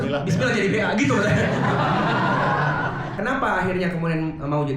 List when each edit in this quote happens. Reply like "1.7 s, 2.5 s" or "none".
3.2 s